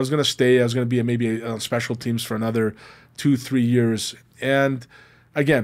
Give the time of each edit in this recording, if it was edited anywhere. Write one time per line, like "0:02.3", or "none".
none